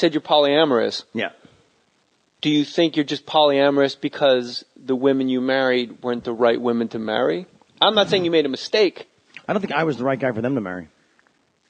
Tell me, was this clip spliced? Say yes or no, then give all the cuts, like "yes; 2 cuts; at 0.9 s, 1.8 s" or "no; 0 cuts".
yes; 1 cut; at 8.2 s